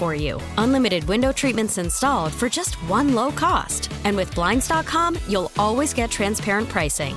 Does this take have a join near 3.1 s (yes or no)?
no